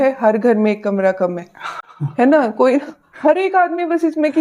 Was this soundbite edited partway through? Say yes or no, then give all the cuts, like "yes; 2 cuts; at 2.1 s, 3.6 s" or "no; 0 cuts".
no; 0 cuts